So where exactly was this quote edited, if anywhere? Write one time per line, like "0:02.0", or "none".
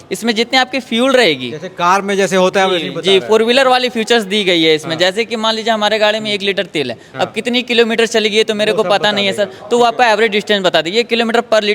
none